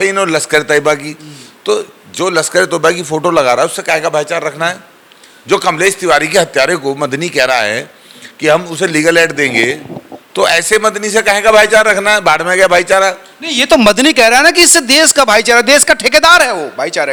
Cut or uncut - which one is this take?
uncut